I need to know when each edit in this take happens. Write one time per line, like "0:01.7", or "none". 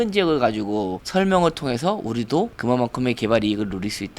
0:01.0